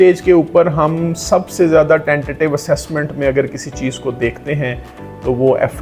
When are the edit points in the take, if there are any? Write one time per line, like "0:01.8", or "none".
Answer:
none